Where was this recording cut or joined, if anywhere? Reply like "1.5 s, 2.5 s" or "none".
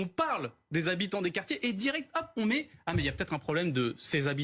none